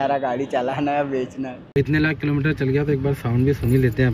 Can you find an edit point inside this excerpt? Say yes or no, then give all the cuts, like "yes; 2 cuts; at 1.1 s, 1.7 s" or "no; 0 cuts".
yes; 1 cut; at 1.6 s